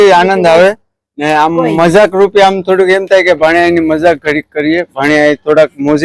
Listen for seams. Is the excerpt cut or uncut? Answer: uncut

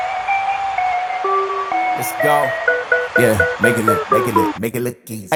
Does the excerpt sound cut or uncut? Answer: uncut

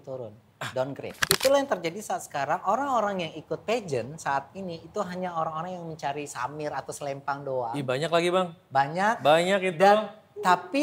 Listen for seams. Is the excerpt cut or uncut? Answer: cut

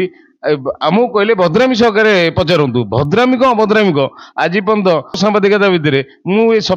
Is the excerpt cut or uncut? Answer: uncut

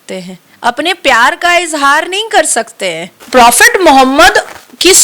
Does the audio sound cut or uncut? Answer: cut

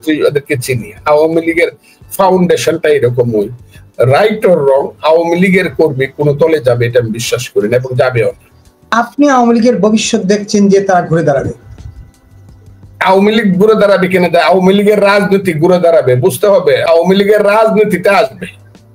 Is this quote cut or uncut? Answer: cut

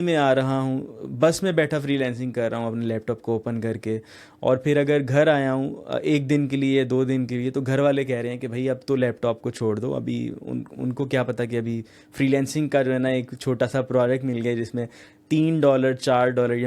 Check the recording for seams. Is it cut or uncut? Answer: uncut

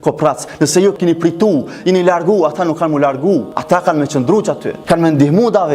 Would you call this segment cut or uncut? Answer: cut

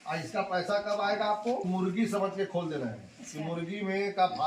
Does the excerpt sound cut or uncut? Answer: cut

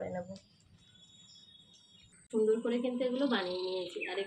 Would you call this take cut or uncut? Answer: cut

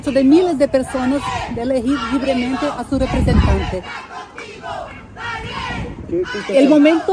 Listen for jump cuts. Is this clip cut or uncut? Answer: uncut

